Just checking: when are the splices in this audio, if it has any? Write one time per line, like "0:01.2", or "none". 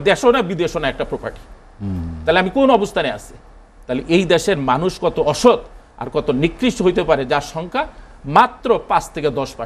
none

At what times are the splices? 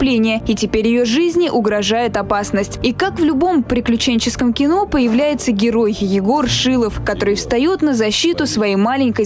0:07.8

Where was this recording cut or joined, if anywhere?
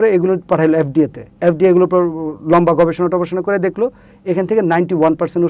none

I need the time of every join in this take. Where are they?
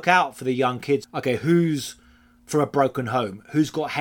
0:01.0

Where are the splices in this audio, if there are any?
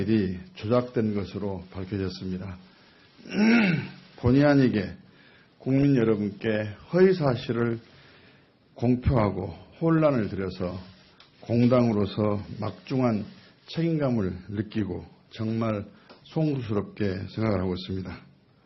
0:10.0

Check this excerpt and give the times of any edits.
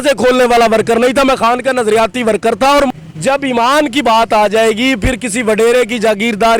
0:02.9

